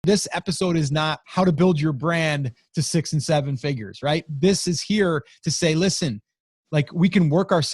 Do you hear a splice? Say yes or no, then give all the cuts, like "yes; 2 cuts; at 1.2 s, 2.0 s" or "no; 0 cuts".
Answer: yes; 1 cut; at 1.2 s